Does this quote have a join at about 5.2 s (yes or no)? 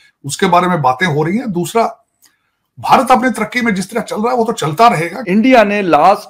yes